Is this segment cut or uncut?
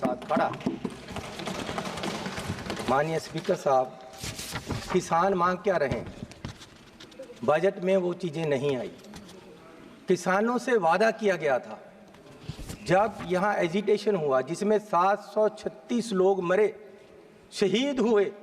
uncut